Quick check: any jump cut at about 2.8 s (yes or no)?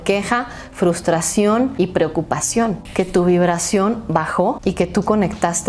yes